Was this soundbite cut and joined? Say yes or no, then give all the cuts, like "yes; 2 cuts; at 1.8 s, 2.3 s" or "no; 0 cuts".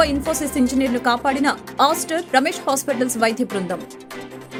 no; 0 cuts